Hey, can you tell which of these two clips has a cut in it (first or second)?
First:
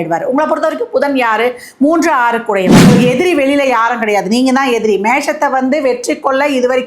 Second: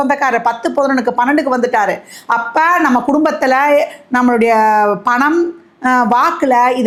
first